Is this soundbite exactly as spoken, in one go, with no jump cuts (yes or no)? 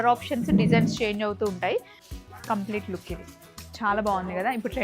no